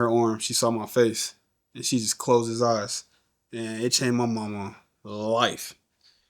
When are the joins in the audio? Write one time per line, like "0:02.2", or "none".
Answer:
none